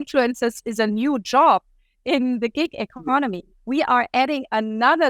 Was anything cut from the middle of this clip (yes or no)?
no